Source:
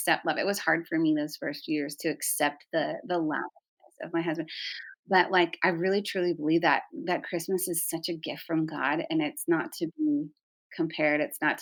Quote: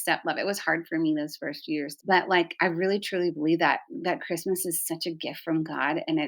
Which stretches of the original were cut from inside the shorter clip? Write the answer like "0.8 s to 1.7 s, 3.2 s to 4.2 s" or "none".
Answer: 1.9 s to 5.0 s